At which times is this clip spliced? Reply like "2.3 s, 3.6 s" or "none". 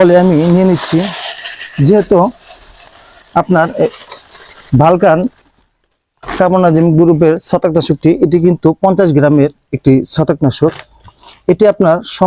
none